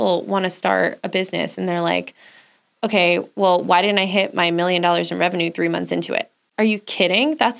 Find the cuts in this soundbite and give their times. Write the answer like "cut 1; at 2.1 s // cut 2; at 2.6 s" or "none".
cut 1; at 6.4 s